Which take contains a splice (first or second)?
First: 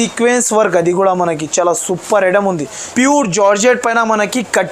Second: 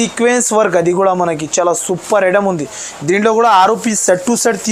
first